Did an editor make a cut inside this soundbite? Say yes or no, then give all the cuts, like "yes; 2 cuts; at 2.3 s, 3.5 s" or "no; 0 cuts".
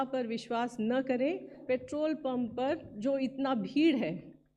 yes; 2 cuts; at 1.6 s, 2.9 s